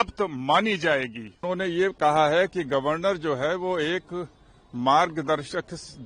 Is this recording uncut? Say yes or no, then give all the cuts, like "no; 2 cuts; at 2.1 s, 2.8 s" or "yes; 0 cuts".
no; 1 cut; at 1.4 s